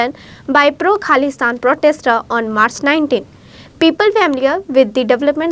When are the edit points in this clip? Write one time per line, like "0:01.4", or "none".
none